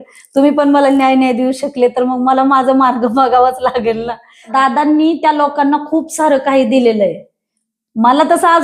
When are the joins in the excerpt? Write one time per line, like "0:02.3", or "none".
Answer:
0:04.5